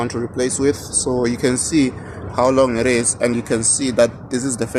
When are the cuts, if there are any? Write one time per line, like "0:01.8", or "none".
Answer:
none